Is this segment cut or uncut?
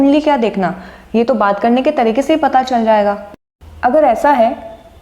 cut